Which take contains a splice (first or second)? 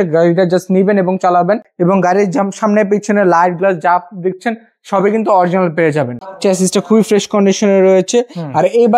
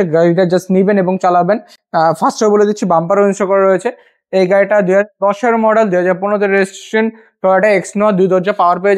first